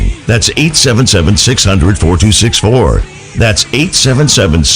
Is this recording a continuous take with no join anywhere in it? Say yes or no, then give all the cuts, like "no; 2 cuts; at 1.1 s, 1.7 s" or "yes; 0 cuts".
yes; 0 cuts